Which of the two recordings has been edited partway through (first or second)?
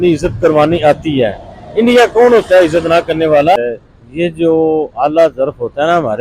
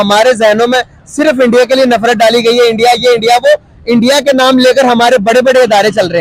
first